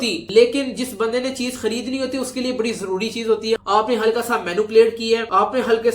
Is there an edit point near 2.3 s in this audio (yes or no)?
no